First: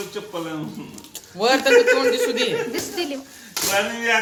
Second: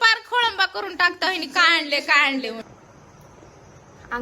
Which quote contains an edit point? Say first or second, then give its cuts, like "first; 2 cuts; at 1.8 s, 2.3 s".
second; 1 cut; at 2.6 s